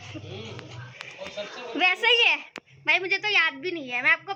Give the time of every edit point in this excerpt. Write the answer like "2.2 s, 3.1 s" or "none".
none